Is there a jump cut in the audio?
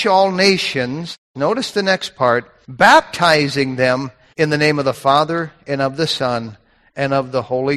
yes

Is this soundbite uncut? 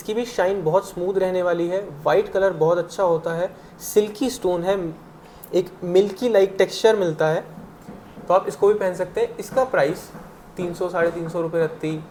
yes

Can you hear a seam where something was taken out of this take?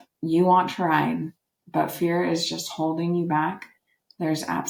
no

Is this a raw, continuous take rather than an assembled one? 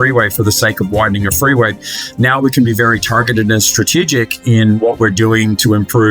no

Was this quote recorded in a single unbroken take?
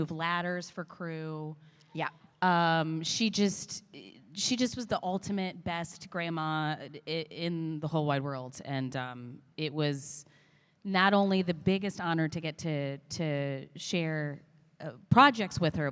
yes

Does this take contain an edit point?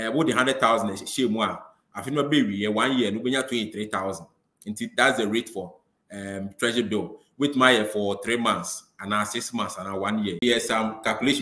yes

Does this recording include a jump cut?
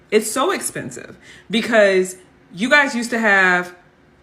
no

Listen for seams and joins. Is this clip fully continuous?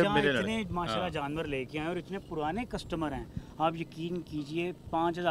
yes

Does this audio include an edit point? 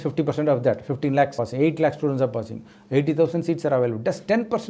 yes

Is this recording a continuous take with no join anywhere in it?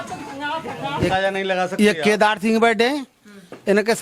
no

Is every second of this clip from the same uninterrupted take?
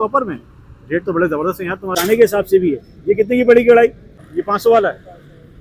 no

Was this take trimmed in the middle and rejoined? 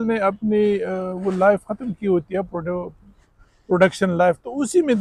no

